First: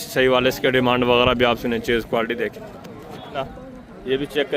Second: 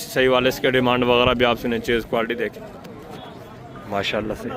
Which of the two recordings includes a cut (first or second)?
first